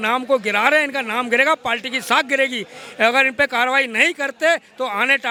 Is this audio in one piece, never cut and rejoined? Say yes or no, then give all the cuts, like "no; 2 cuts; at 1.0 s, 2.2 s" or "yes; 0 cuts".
yes; 0 cuts